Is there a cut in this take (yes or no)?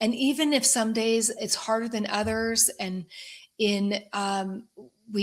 no